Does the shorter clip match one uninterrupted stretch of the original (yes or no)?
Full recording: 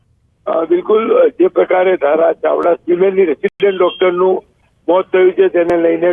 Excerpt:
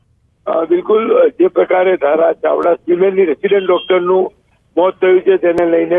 no